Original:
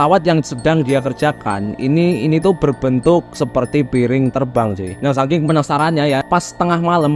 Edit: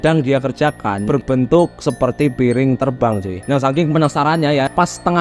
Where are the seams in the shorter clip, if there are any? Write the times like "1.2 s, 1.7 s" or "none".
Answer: 1.1 s